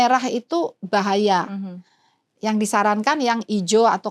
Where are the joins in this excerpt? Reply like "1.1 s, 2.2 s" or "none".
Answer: none